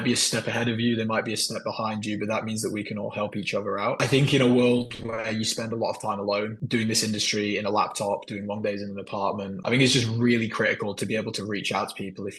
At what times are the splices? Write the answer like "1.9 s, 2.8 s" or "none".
none